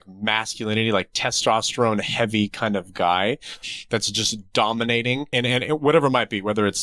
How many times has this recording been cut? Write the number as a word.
one